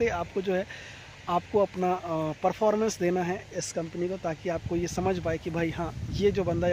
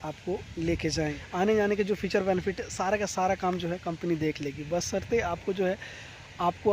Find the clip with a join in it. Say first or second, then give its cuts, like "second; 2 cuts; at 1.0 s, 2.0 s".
second; 1 cut; at 1.3 s